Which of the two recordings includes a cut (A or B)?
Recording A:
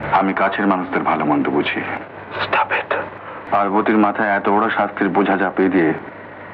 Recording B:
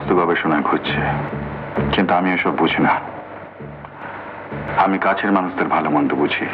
A